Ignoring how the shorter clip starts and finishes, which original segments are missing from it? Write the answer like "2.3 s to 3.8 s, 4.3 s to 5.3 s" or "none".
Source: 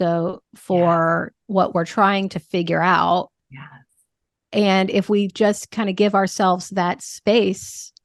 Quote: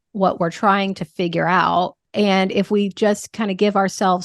3.4 s to 4.4 s